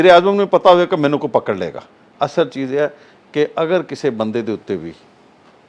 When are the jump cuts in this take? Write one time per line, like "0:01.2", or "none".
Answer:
0:02.0